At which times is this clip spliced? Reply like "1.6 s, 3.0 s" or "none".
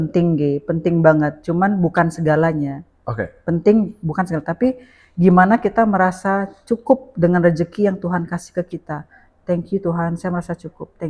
none